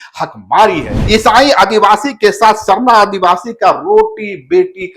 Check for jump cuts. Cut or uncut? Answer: cut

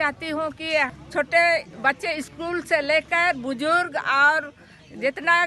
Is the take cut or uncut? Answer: cut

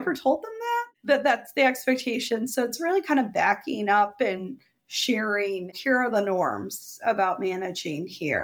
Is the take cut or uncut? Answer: cut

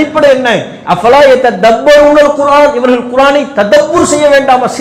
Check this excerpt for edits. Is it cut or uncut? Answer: uncut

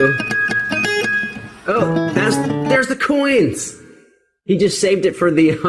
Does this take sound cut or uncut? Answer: uncut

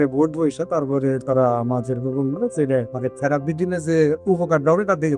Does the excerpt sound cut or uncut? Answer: cut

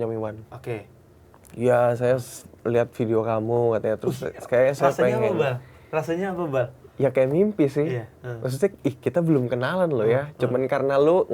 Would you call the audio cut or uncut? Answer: uncut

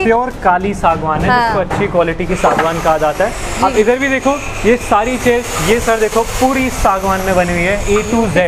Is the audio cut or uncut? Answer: uncut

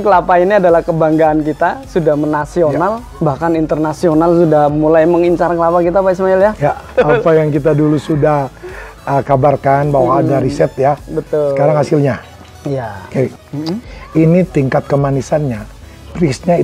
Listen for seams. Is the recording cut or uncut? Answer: cut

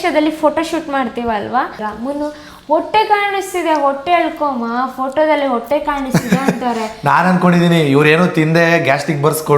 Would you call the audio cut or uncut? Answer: cut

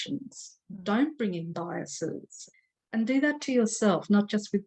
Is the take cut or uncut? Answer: cut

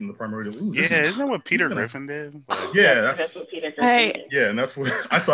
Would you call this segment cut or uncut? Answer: uncut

